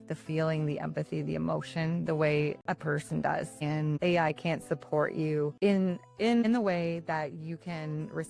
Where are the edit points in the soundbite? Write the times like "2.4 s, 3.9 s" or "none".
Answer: 2.6 s, 5.5 s

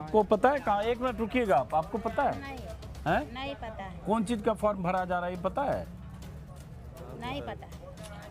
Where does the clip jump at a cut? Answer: none

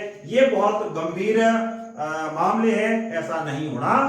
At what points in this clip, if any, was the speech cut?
none

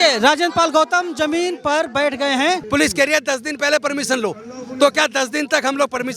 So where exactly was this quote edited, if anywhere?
2.6 s

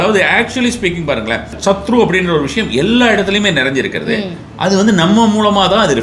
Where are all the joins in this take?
1.6 s

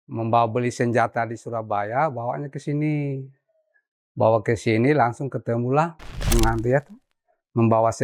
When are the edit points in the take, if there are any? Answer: 6.3 s

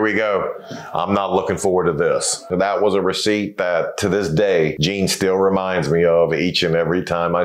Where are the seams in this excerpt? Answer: 2.4 s, 4.8 s

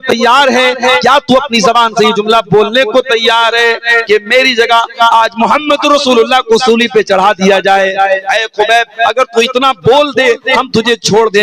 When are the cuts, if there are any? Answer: none

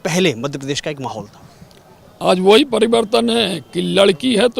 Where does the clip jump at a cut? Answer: none

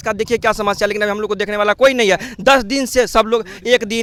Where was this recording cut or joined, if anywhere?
none

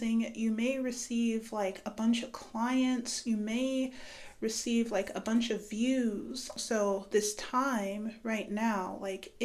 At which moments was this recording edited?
6.5 s

